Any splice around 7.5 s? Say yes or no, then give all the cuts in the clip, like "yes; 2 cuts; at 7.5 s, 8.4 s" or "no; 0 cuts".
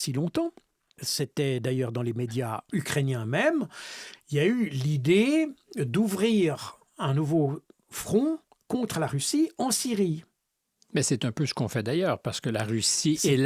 no; 2 cuts; at 1.0 s, 2.6 s